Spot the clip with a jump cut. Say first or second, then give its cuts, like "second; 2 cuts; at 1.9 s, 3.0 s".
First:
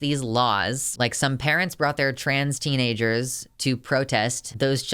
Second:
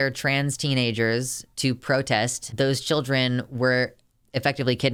first; 1 cut; at 0.9 s